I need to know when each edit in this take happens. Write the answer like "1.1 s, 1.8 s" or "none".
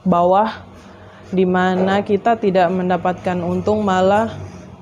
none

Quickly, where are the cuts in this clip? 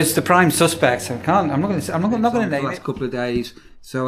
2.6 s

